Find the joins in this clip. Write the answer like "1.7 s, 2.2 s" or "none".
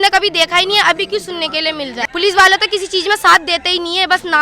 2.0 s